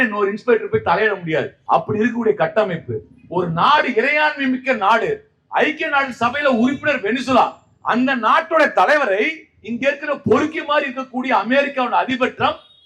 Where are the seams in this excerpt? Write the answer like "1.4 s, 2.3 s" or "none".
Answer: 1.6 s